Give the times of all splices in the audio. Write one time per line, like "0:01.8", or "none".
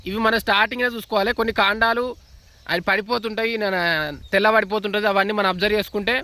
none